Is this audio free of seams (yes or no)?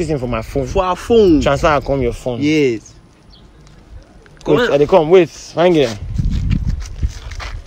yes